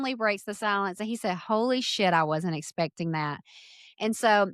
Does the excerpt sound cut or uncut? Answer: uncut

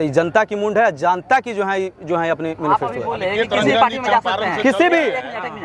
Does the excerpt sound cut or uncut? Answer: uncut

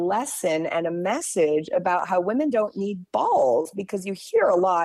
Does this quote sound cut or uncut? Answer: uncut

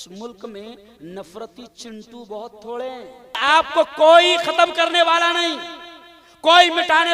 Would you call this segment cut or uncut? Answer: cut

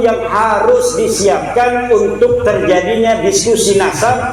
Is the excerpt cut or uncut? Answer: uncut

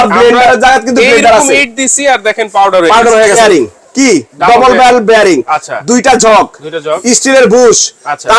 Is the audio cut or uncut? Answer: cut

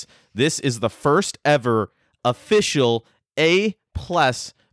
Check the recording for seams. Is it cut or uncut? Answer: uncut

